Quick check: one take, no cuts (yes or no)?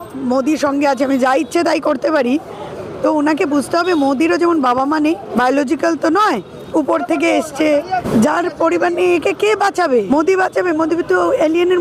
no